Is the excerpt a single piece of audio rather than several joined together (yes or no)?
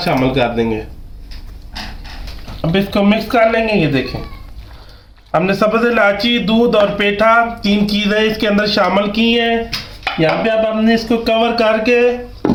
yes